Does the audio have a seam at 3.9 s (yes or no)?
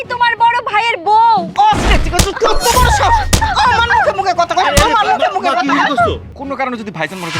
no